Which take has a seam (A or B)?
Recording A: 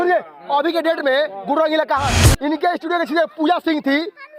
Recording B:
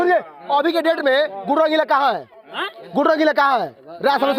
A